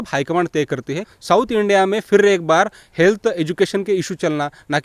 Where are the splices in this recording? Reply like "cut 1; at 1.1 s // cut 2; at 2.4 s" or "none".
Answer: cut 1; at 1.1 s